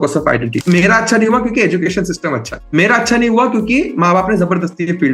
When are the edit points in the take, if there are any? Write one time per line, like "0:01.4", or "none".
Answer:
0:02.6